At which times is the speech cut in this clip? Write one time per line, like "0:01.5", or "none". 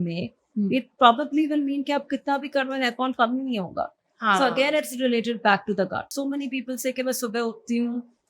0:06.1